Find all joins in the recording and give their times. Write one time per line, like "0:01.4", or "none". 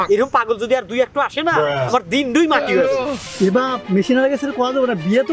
0:03.0